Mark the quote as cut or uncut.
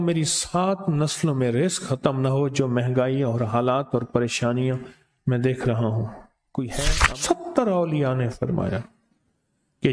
cut